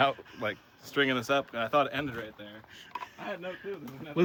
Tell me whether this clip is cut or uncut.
uncut